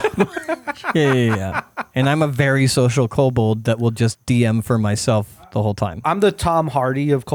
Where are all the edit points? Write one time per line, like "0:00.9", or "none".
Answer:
none